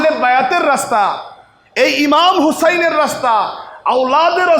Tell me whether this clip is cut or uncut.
uncut